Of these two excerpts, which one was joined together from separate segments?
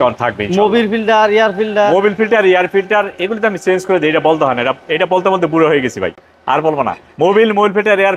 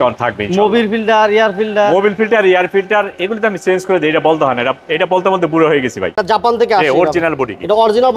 second; 1 cut; at 6.2 s

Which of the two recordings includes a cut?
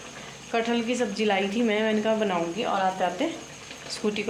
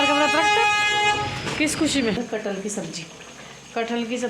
second; 1 cut; at 2.2 s

